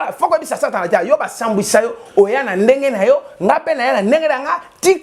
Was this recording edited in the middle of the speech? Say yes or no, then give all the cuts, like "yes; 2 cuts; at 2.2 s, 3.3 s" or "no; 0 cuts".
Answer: no; 0 cuts